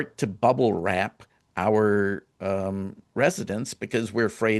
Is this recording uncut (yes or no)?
yes